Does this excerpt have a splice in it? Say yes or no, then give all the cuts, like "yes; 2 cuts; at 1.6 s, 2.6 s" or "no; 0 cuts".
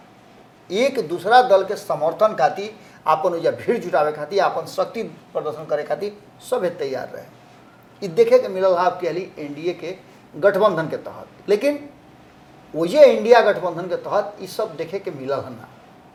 no; 0 cuts